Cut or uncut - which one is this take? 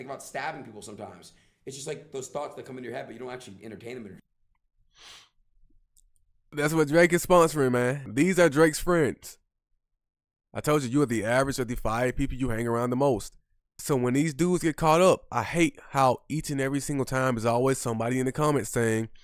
uncut